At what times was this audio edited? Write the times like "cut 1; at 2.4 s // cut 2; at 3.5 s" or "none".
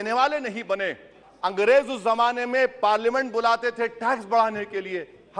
cut 1; at 1.2 s